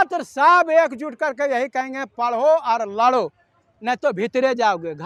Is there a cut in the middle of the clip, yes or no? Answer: no